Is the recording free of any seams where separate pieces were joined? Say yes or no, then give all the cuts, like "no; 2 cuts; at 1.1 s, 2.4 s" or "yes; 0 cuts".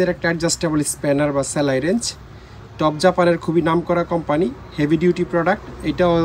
yes; 0 cuts